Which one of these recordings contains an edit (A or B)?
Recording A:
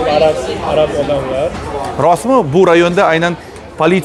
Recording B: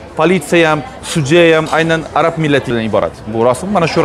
B